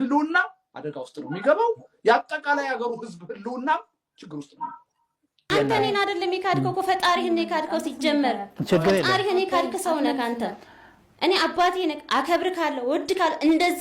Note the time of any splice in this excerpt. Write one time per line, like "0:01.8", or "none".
0:05.3